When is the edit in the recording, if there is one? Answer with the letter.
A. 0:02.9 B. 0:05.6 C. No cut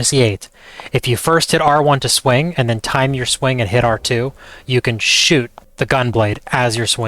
B